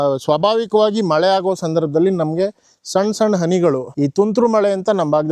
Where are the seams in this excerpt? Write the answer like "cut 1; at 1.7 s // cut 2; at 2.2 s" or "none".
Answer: none